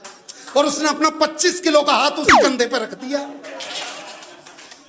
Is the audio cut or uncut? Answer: uncut